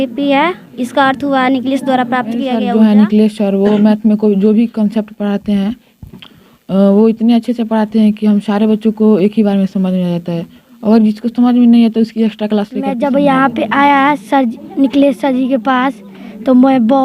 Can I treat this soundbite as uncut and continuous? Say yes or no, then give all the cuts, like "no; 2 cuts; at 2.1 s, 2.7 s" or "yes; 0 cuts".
no; 2 cuts; at 2.5 s, 12.9 s